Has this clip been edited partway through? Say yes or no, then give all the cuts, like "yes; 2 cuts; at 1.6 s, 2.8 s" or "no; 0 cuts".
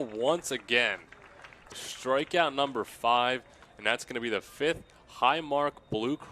yes; 1 cut; at 1.7 s